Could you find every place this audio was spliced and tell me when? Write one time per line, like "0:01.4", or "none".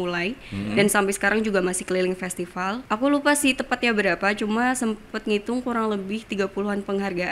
0:02.8